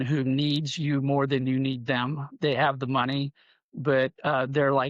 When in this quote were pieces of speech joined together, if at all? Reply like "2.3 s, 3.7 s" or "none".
none

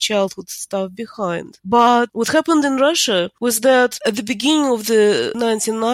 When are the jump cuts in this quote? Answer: 2.1 s, 3.3 s, 4.0 s

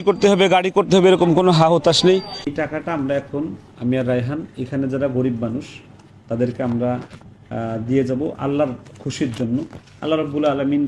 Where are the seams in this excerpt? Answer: 2.4 s

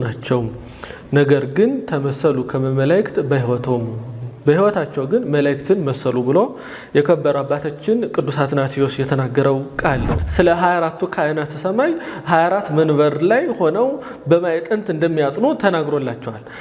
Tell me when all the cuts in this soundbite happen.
10.1 s

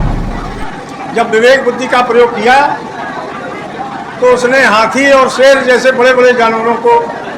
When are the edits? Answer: none

